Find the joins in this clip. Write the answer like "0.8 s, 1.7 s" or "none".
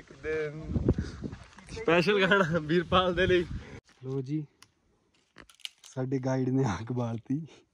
3.6 s